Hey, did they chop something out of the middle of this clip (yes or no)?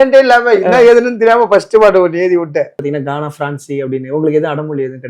yes